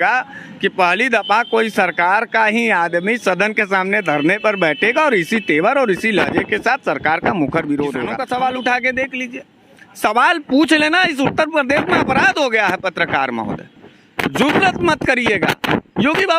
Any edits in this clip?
yes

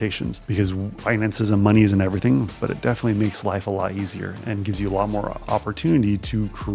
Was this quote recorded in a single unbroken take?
yes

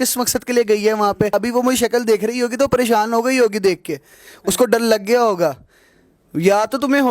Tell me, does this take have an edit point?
yes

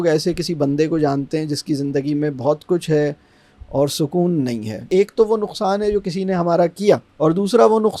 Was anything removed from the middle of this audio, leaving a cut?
yes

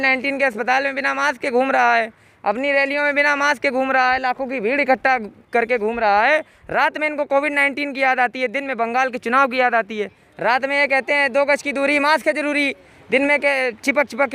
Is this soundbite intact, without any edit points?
yes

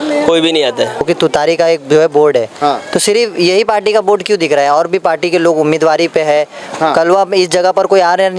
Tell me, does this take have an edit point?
yes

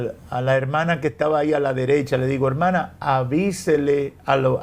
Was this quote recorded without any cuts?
yes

